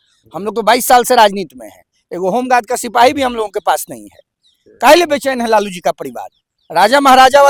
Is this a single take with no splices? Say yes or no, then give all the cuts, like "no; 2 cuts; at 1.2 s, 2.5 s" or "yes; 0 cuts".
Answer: yes; 0 cuts